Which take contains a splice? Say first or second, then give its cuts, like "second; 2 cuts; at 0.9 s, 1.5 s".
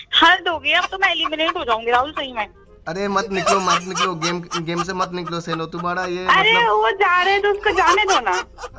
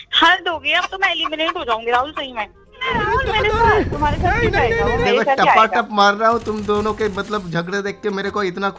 second; 1 cut; at 2.8 s